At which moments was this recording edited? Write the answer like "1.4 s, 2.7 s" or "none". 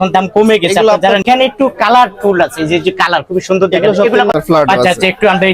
1.2 s, 4.3 s